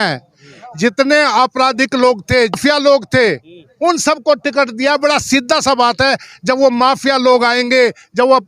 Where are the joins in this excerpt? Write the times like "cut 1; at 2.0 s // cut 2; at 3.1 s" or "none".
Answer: cut 1; at 2.6 s